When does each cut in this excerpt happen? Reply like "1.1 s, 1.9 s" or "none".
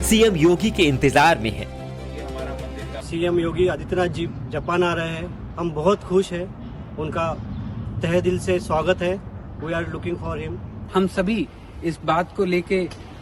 none